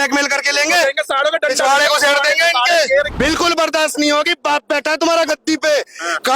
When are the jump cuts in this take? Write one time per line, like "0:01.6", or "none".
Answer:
0:03.1